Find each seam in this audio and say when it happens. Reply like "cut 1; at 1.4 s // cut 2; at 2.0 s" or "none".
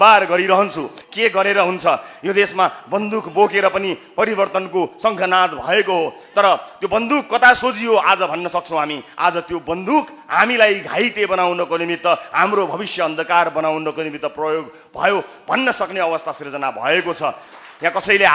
cut 1; at 1.0 s // cut 2; at 17.4 s